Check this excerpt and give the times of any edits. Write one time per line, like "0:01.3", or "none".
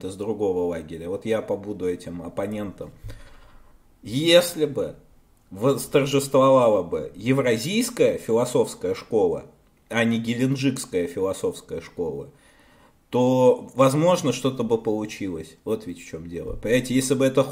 none